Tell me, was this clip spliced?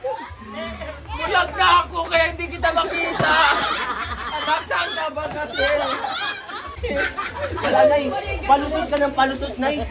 yes; 1 cut; at 6.8 s

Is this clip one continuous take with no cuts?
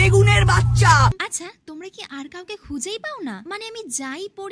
no; 1 cut; at 1.0 s

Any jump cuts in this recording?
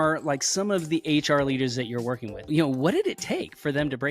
yes; 1 cut; at 2.4 s

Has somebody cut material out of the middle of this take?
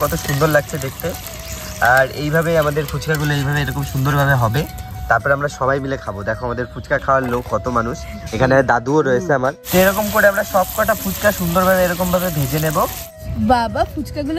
no; 0 cuts

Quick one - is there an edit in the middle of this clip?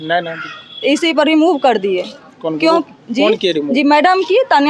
no; 0 cuts

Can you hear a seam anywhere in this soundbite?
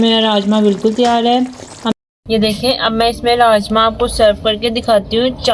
yes; 1 cut; at 1.9 s

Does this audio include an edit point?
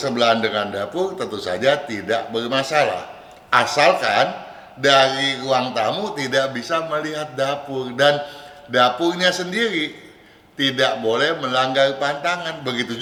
no; 0 cuts

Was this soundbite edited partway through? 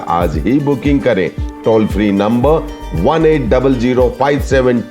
no; 0 cuts

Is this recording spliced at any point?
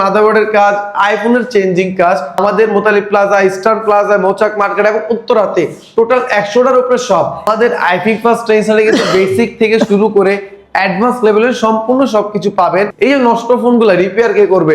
yes; 3 cuts; at 2.4 s, 7.5 s, 12.9 s

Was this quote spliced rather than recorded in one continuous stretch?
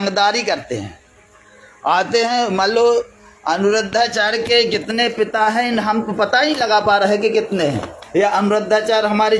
yes; 1 cut; at 7.9 s

